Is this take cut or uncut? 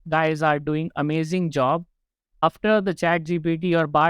cut